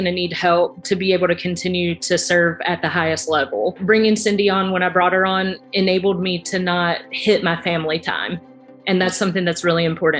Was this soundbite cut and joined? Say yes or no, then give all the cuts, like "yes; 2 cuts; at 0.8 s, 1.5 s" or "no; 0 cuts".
yes; 1 cut; at 3.8 s